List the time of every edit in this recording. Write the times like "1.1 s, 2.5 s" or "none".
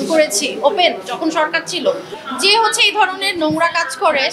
2.1 s